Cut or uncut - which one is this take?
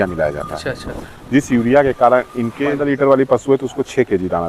cut